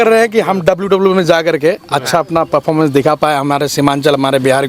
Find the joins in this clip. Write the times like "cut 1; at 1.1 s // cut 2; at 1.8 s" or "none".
none